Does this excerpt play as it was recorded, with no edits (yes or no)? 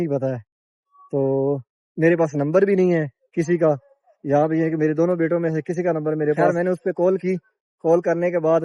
no